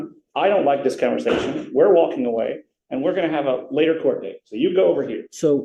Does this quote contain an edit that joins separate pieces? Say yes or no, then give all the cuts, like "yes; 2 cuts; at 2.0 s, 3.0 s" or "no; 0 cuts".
no; 0 cuts